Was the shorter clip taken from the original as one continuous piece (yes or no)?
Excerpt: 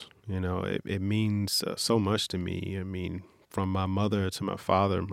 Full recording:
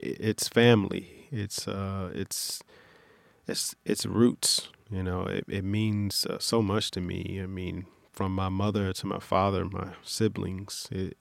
yes